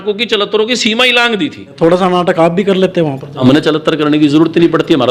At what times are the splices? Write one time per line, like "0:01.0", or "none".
0:01.7
0:03.3